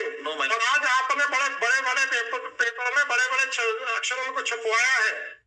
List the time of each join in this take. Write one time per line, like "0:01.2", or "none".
none